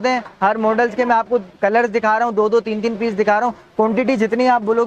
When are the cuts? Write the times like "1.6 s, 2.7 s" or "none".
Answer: none

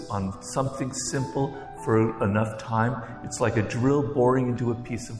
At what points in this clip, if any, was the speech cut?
none

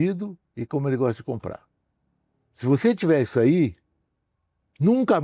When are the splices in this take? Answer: none

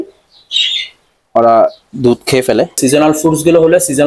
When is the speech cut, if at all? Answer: 2.8 s

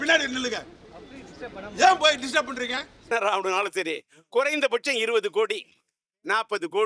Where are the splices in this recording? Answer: 3.0 s

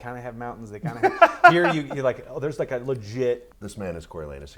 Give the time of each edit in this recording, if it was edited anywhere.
3.5 s

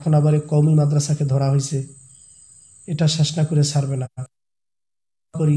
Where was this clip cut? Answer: none

